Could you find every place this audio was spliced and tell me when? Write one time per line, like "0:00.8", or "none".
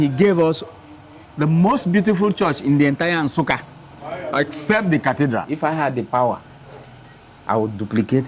0:05.5